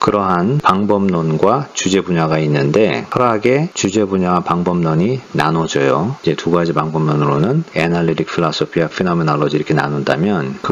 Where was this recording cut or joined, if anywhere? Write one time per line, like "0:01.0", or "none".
none